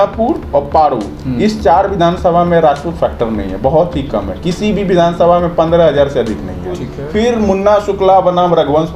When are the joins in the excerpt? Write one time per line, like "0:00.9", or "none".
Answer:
0:06.9

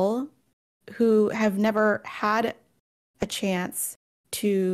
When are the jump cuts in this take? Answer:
none

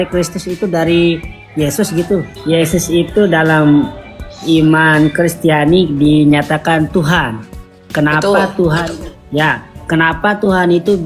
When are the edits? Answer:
0:02.3

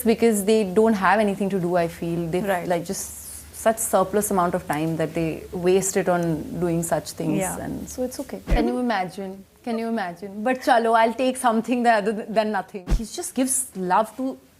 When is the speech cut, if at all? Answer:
0:08.5
0:12.8

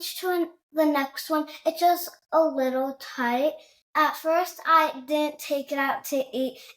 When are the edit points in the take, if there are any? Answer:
0:03.7

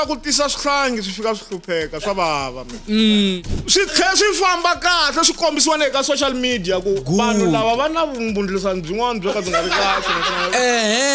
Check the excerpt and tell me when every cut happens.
0:03.4

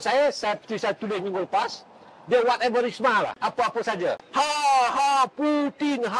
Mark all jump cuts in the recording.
0:04.2

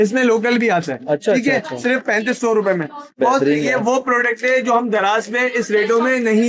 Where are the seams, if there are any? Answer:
none

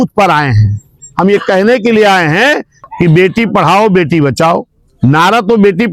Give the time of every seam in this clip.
0:02.8

